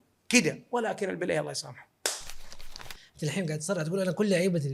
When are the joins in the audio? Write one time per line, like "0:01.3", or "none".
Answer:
0:02.7